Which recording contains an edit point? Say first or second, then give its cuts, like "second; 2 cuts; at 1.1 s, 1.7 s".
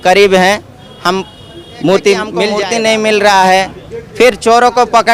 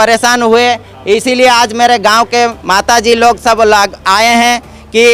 first; 1 cut; at 2.5 s